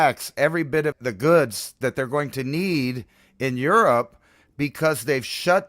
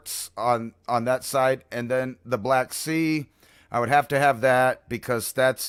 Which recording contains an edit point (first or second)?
first